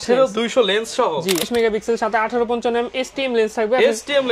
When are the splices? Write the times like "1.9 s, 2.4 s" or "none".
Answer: 1.5 s